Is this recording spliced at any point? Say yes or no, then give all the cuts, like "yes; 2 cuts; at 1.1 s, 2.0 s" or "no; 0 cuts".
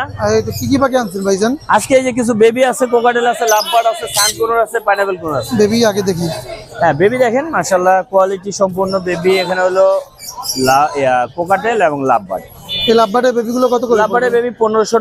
no; 0 cuts